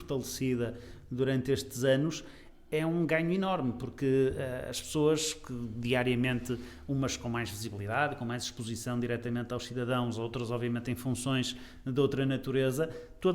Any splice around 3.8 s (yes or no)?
no